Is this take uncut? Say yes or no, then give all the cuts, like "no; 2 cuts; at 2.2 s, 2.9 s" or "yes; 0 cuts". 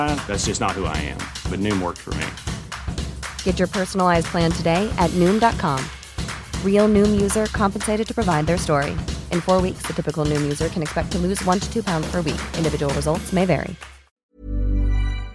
no; 1 cut; at 14.4 s